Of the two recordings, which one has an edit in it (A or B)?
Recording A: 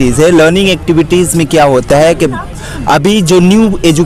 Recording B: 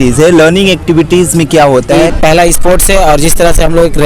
B